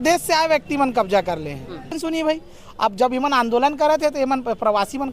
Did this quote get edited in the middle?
yes; 1 cut; at 2.0 s

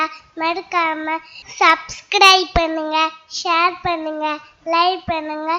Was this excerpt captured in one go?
yes; 0 cuts

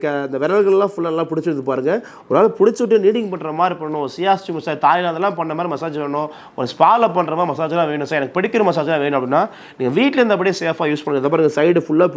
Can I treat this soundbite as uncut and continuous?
yes; 0 cuts

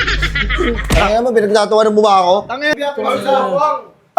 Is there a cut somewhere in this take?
yes; 1 cut; at 2.6 s

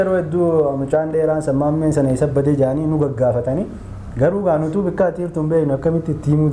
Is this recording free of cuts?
yes; 0 cuts

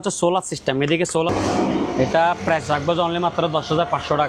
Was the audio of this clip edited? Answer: yes; 1 cut; at 1.3 s

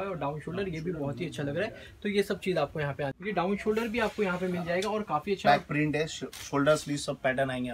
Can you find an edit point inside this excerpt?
yes; 1 cut; at 3.2 s

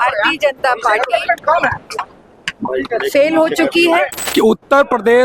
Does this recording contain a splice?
yes; 1 cut; at 4.2 s

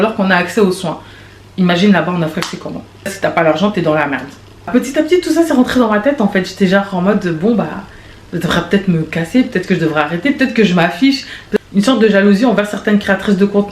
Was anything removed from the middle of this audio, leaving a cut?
yes; 3 cuts; at 3.1 s, 4.7 s, 11.4 s

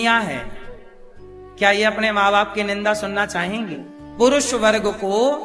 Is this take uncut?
no; 1 cut; at 4.1 s

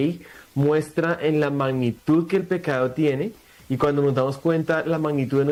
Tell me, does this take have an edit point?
no; 0 cuts

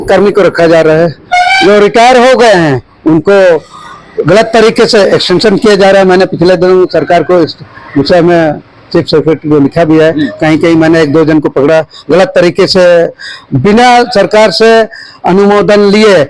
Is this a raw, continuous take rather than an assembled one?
yes; 0 cuts

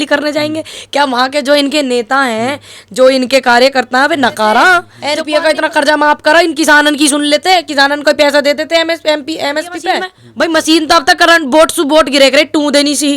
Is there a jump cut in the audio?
yes; 2 cuts; at 5.0 s, 10.2 s

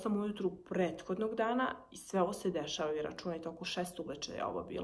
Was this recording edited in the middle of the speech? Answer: no; 0 cuts

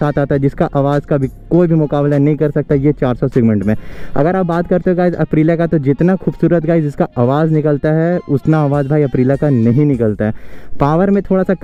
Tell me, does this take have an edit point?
no; 0 cuts

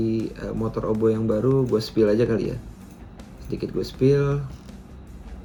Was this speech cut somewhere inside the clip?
no; 0 cuts

